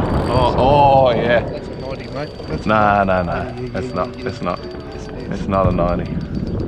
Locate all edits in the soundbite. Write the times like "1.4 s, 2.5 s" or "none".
none